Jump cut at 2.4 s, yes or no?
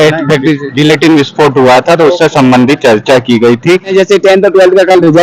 no